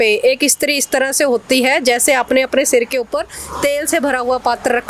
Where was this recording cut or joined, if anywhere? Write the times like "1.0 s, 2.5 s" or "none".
none